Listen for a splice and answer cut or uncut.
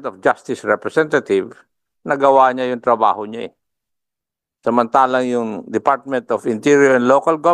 uncut